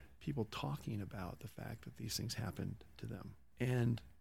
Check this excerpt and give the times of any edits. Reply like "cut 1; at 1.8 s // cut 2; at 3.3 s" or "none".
none

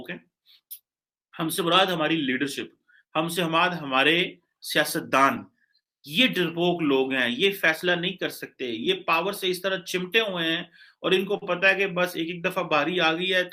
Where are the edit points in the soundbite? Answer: none

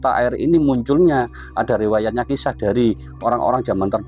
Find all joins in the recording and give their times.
none

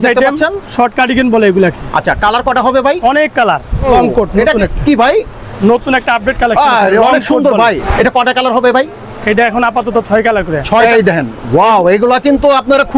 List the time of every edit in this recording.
cut 1; at 3.9 s // cut 2; at 7.8 s // cut 3; at 10.8 s

